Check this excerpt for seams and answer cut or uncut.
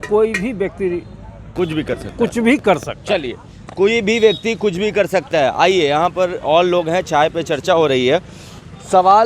uncut